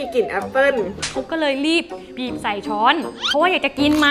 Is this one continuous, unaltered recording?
no; 2 cuts; at 1.0 s, 2.1 s

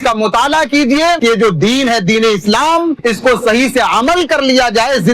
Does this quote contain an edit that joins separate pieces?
yes; 2 cuts; at 1.2 s, 3.0 s

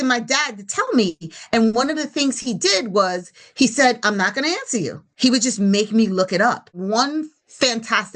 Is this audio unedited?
no; 2 cuts; at 5.0 s, 6.7 s

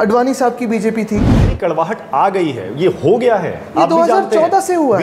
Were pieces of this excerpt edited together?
yes; 1 cut; at 1.6 s

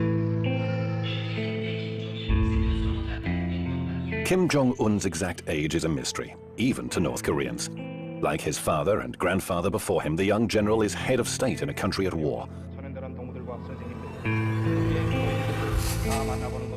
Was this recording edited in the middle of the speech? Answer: yes; 1 cut; at 12.7 s

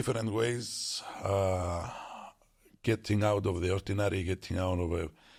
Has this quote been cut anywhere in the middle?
no; 0 cuts

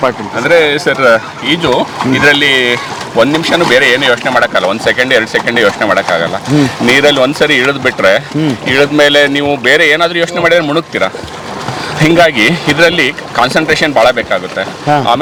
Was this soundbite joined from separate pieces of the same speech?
no; 0 cuts

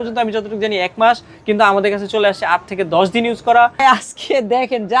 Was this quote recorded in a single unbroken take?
no; 1 cut; at 3.8 s

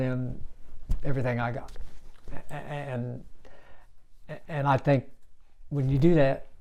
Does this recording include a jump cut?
no; 0 cuts

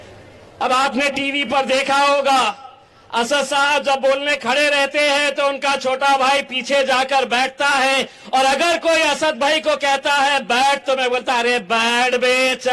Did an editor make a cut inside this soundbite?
no; 0 cuts

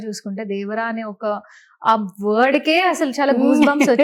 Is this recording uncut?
yes; 0 cuts

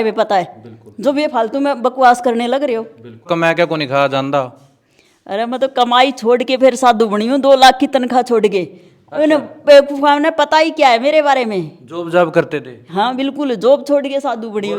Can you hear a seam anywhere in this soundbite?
yes; 1 cut; at 3.3 s

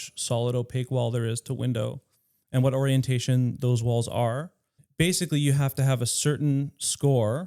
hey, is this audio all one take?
no; 1 cut; at 4.8 s

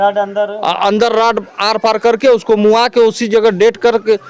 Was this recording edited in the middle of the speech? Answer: no; 0 cuts

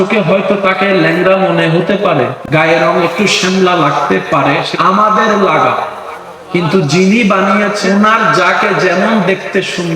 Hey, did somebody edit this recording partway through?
yes; 3 cuts; at 2.4 s, 4.7 s, 7.8 s

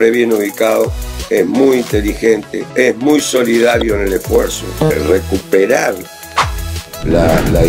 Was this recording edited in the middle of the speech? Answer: yes; 2 cuts; at 2.6 s, 4.9 s

